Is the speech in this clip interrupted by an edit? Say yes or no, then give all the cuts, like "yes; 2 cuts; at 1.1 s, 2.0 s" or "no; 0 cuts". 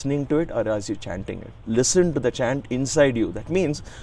yes; 1 cut; at 1.5 s